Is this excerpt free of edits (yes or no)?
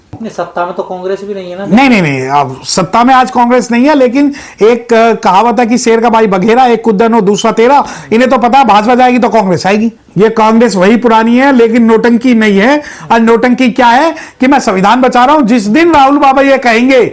no